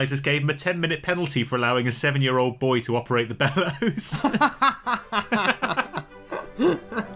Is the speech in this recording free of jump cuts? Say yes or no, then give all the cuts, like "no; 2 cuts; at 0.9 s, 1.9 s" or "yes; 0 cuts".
yes; 0 cuts